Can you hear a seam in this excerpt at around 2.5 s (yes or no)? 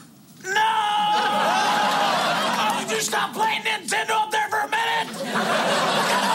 yes